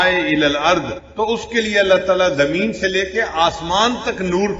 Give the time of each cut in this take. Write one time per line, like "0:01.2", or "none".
0:01.0